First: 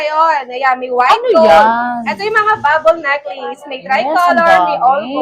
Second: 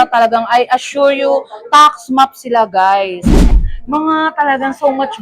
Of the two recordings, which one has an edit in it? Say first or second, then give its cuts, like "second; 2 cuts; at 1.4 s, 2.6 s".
second; 1 cut; at 3.4 s